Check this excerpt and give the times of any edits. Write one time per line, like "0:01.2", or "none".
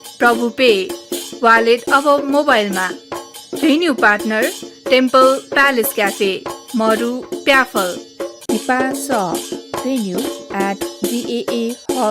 0:04.7
0:08.3